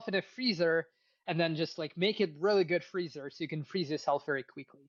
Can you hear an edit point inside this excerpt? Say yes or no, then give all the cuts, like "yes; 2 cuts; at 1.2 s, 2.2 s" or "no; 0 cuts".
no; 0 cuts